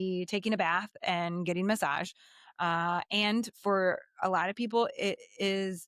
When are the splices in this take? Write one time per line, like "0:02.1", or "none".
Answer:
none